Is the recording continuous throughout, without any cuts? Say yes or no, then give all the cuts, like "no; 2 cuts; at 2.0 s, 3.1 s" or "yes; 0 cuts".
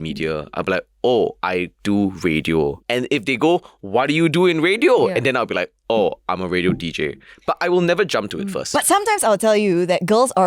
no; 2 cuts; at 1.4 s, 2.8 s